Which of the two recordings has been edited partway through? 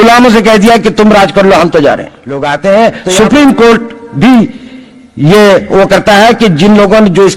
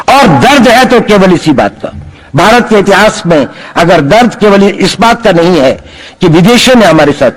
first; 1 cut; at 2.5 s

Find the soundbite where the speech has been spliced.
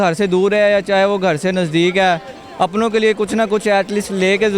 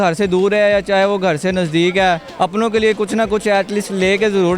second; 1 cut; at 2.3 s

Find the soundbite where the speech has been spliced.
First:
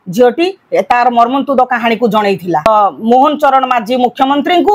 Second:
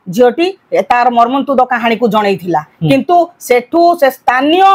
first; 1 cut; at 2.7 s

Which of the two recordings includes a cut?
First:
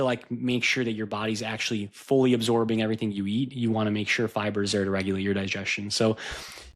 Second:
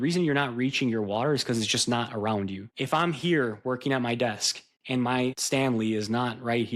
second; 2 cuts; at 2.6 s, 5.4 s

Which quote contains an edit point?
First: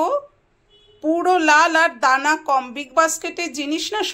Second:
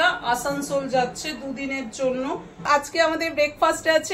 second; 1 cut; at 2.7 s

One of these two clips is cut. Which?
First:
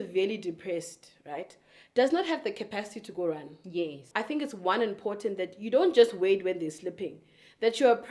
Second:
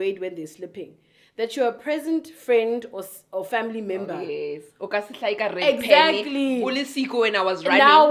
first; 1 cut; at 4.1 s

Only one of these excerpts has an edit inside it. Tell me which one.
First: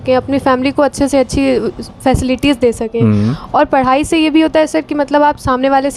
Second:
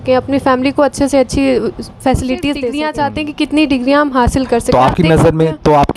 second; 1 cut; at 2.8 s

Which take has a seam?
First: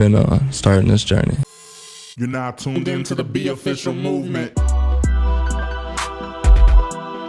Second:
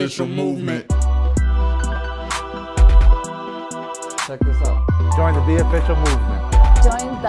first; 1 cut; at 1.4 s

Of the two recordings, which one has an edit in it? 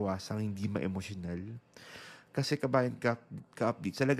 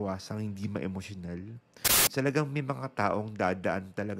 second; 1 cut; at 2.1 s

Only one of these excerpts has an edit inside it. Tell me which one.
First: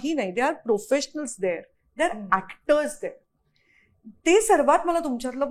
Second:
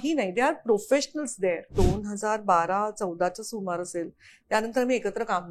second; 1 cut; at 1.7 s

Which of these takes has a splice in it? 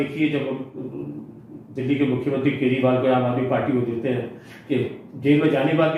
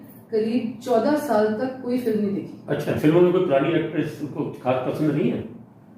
second; 1 cut; at 3.0 s

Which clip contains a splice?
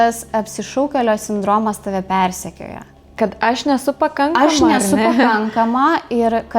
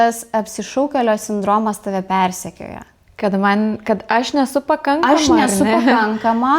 first; 1 cut; at 3.1 s

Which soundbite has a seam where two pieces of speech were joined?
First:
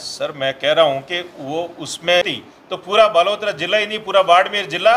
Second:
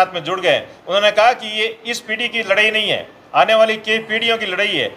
first; 1 cut; at 2.2 s

